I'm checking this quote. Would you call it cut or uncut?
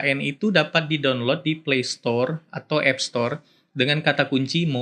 uncut